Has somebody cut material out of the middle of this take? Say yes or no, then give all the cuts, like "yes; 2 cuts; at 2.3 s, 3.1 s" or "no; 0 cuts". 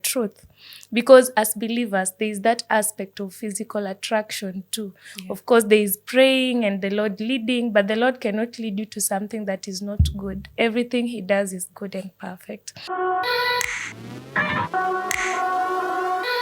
yes; 1 cut; at 12.9 s